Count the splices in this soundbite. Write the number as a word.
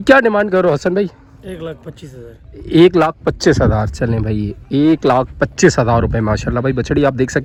zero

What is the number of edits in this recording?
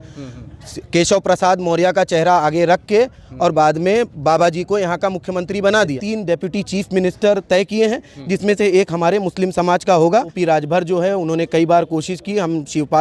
two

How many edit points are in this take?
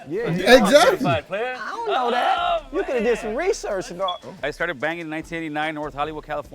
one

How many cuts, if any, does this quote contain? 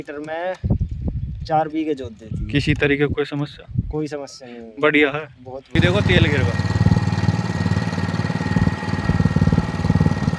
one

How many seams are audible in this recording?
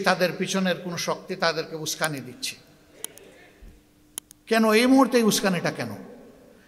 zero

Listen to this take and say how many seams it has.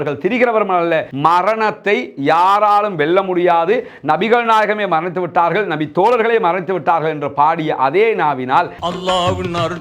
two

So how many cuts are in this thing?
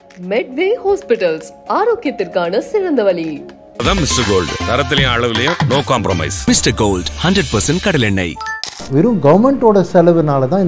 one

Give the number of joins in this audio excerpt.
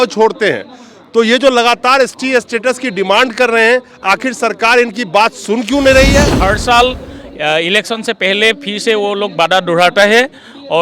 one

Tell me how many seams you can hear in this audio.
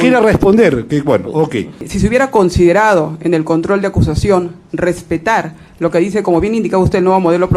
one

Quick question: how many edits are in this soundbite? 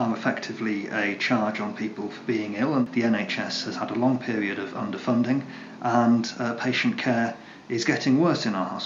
one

